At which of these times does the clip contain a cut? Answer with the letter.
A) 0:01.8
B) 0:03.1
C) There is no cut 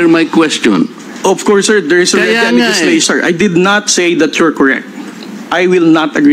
B